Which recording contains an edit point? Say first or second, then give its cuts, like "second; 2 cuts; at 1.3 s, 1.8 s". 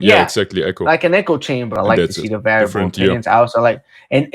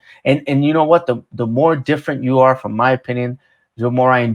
first; 1 cut; at 1.7 s